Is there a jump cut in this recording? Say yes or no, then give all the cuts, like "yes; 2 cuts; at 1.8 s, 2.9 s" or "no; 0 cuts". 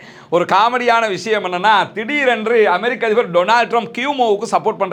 no; 0 cuts